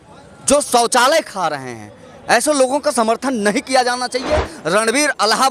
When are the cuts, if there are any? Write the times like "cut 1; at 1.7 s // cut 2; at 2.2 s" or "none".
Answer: cut 1; at 4.5 s